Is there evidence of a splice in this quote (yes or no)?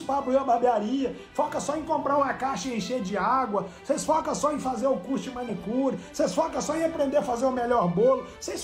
no